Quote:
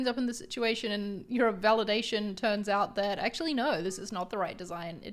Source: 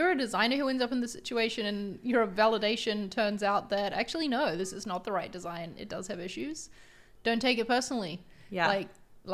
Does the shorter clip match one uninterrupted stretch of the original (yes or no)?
yes